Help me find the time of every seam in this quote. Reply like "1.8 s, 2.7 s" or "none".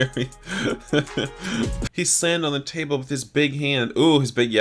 1.8 s